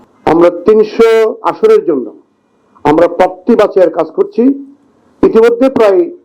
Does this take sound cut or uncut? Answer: uncut